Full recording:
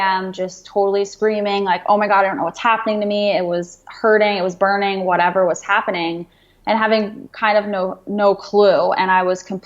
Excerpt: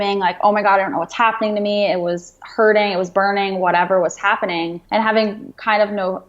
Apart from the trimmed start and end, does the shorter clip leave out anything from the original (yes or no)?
yes